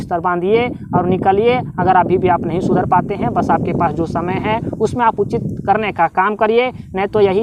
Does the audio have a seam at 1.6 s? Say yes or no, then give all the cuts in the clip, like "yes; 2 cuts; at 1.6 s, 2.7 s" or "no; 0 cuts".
no; 0 cuts